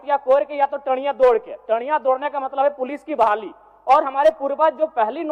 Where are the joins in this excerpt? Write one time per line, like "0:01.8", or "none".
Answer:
none

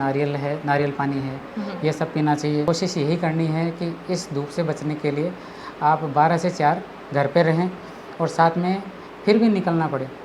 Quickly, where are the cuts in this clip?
0:02.7

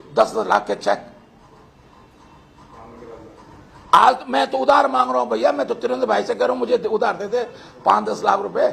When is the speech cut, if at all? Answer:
none

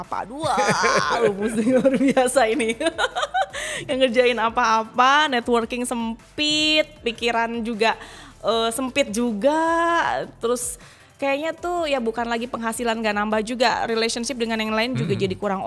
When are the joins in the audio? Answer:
none

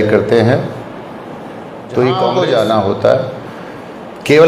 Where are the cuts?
0:02.3

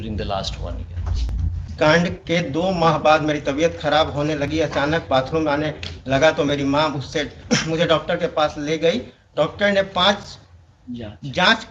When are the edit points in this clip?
0:01.6

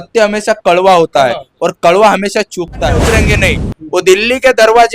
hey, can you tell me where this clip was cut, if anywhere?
0:03.0

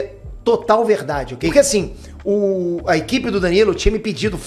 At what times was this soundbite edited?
0:01.5

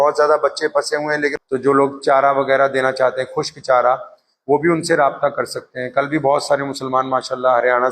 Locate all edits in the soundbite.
0:01.4

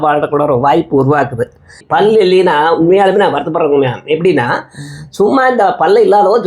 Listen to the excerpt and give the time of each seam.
0:01.8

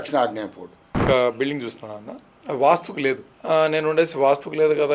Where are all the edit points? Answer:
0:01.0
0:03.3

